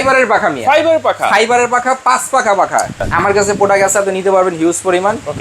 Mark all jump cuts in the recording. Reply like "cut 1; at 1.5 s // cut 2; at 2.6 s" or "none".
cut 1; at 3.0 s